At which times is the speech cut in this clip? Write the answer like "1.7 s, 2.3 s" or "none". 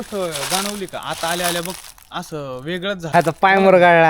3.0 s